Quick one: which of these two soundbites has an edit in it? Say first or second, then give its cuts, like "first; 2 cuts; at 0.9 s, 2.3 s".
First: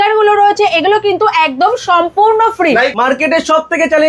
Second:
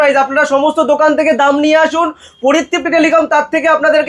first; 1 cut; at 2.9 s